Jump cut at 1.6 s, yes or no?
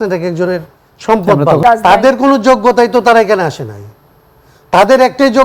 yes